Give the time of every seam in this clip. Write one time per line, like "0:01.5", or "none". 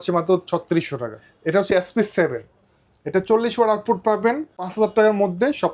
0:01.5
0:04.7